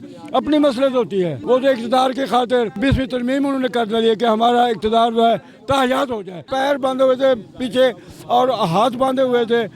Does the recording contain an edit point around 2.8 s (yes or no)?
yes